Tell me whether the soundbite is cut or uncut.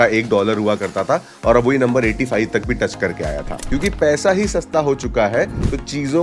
cut